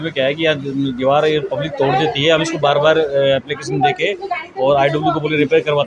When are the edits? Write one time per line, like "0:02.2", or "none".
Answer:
none